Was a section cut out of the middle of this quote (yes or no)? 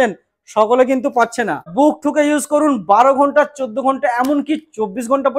yes